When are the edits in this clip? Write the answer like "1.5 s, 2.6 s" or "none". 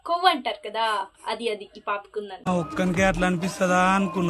2.5 s